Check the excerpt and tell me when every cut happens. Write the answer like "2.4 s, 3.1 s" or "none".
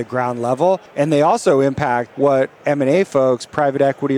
0.9 s, 2.1 s